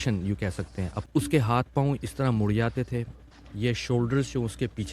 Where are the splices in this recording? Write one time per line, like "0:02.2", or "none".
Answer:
0:01.0